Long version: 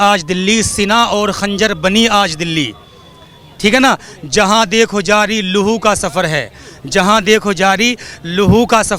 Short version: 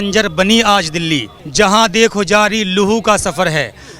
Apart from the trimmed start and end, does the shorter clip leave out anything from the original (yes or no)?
yes